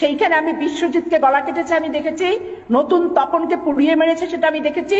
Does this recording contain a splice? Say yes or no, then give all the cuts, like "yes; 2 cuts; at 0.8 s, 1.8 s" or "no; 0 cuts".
no; 0 cuts